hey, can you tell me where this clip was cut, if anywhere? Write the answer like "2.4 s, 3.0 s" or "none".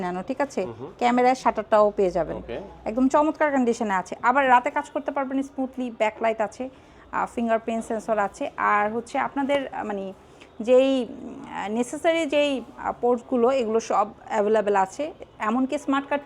none